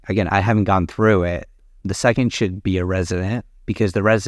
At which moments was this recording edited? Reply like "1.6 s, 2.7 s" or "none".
1.7 s